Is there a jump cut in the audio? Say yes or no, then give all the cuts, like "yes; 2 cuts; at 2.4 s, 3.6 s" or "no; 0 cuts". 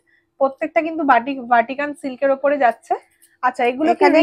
no; 0 cuts